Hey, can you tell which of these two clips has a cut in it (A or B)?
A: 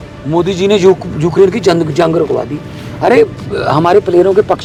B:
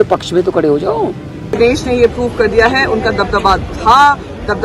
B